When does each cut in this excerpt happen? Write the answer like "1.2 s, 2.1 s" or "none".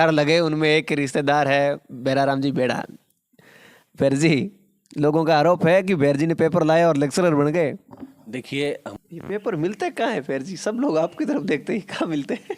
8.9 s